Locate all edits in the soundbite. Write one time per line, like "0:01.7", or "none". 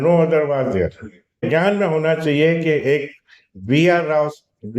0:01.4